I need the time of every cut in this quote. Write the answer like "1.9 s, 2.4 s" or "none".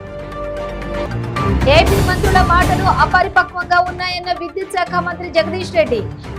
1.0 s